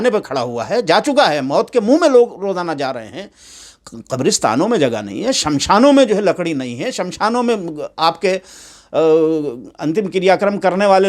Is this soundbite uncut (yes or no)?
yes